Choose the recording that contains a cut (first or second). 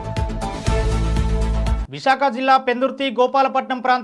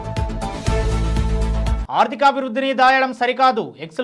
second